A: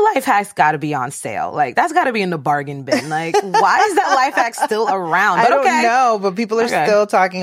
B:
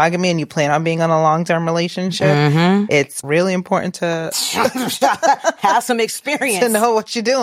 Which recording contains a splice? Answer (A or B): B